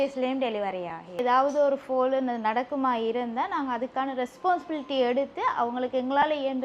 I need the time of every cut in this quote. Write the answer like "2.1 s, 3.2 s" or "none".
1.2 s